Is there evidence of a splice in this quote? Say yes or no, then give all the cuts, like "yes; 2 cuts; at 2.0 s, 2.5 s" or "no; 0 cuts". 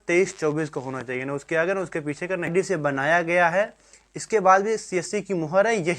yes; 1 cut; at 2.5 s